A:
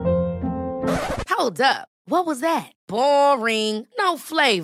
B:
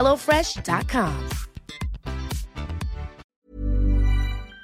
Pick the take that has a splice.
B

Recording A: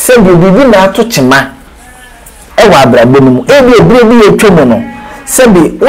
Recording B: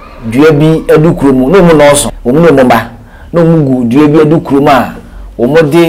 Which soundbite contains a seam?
B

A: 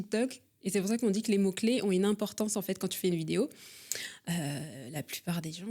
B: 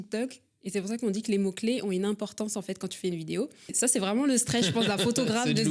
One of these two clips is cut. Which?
B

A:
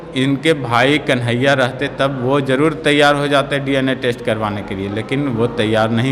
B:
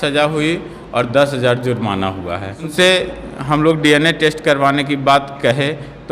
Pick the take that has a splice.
B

